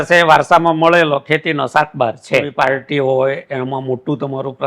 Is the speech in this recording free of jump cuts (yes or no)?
no